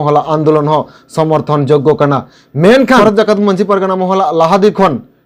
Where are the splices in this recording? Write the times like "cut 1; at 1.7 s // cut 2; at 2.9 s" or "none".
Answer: cut 1; at 3.0 s